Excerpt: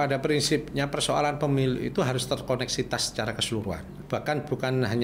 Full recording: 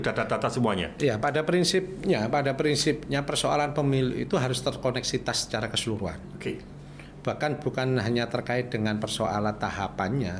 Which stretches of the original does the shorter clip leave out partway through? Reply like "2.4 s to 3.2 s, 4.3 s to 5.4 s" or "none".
6.3 s to 7.1 s